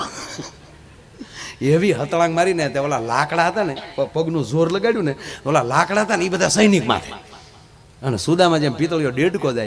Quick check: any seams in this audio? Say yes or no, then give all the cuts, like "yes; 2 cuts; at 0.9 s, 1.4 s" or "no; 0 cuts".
no; 0 cuts